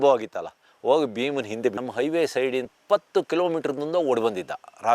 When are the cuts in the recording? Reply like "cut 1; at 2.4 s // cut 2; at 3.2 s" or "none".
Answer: cut 1; at 1.8 s // cut 2; at 2.7 s